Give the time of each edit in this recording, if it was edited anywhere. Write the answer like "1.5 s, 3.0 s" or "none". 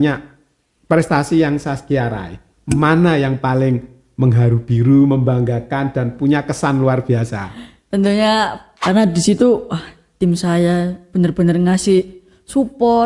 8.7 s